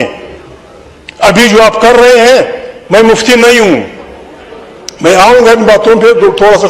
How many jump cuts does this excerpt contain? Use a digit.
0